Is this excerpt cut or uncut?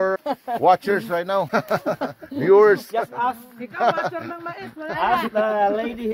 cut